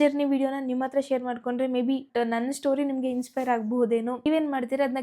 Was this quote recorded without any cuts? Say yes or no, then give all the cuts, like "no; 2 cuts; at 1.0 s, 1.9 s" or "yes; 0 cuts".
no; 2 cuts; at 2.0 s, 4.2 s